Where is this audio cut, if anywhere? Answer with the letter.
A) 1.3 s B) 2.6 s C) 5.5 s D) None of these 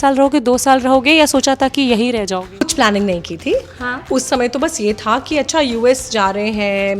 B